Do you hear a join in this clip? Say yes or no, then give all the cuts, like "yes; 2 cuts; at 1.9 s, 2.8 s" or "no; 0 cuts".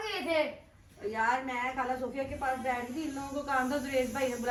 no; 0 cuts